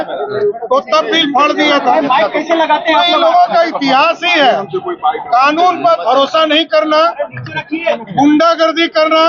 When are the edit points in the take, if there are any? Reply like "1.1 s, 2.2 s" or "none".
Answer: none

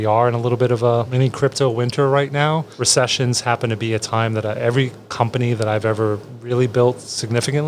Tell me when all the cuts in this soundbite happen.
1.1 s, 2.7 s

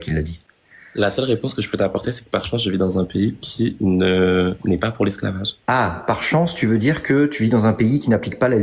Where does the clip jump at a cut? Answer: none

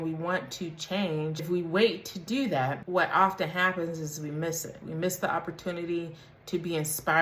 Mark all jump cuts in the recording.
1.4 s, 2.8 s

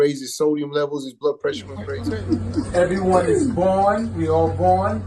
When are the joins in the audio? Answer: 1.8 s

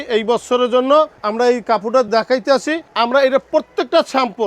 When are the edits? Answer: none

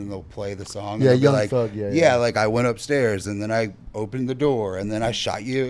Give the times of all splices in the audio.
none

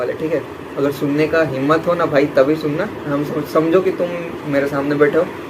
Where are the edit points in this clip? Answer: 3.0 s

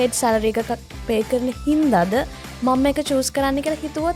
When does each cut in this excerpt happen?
none

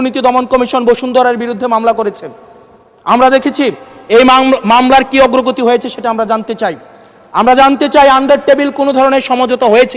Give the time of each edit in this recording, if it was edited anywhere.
none

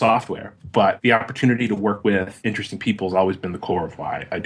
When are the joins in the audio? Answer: 1.0 s, 2.1 s

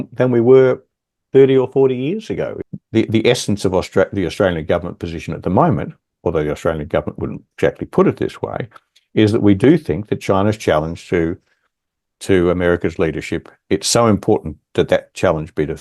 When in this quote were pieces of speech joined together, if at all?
2.6 s

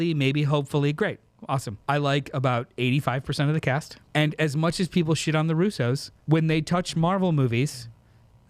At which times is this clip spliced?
1.7 s, 4.0 s, 6.1 s

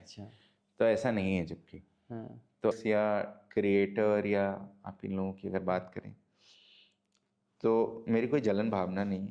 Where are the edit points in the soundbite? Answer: 2.8 s

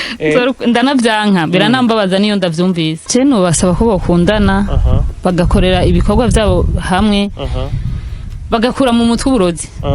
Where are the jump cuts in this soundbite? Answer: 3.0 s

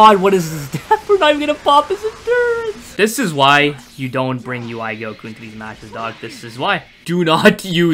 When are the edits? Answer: 2.8 s, 6.9 s

